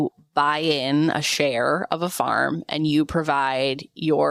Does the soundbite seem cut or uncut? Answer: uncut